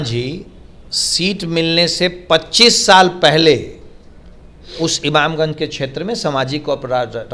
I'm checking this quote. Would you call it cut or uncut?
uncut